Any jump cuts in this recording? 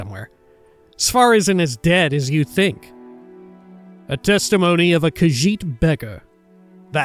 yes; 1 cut; at 2.9 s

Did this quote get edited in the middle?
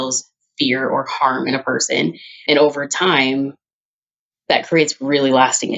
no; 0 cuts

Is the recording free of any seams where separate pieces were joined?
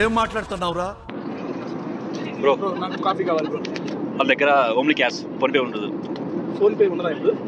no; 1 cut; at 1.2 s

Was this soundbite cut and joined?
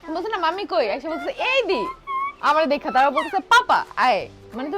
no; 0 cuts

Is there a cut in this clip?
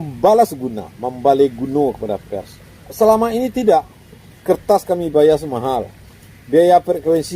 yes; 1 cut; at 2.9 s

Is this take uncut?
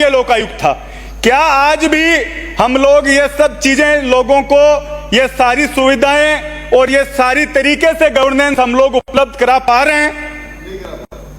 yes; 0 cuts

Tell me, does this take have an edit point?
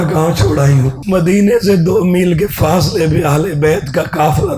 yes; 1 cut; at 1.0 s

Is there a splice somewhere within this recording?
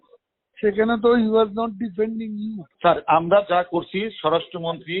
yes; 1 cut; at 2.7 s

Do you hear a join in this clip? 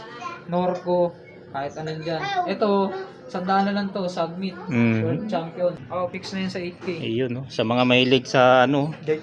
yes; 1 cut; at 5.8 s

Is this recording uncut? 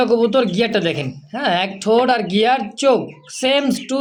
yes; 0 cuts

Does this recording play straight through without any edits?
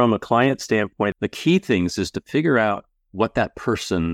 no; 1 cut; at 1.1 s

